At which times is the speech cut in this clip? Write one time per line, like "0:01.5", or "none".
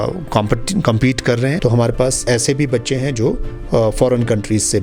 0:01.6
0:02.2